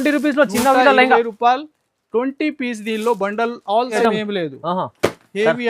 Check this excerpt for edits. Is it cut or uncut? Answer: cut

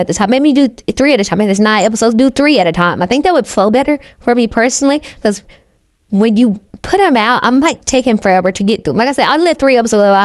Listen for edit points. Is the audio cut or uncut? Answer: uncut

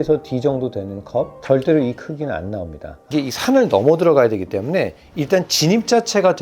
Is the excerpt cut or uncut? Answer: cut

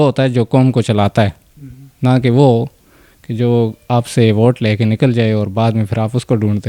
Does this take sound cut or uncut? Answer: uncut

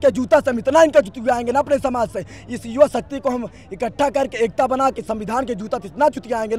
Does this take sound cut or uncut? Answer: uncut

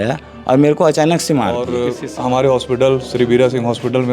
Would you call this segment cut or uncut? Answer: cut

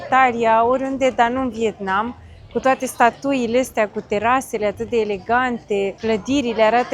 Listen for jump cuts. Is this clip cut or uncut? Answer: uncut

